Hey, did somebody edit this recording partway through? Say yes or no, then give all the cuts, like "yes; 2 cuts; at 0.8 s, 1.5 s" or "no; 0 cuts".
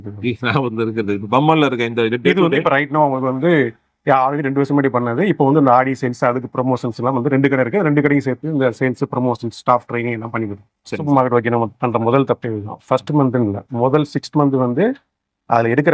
yes; 1 cut; at 11.0 s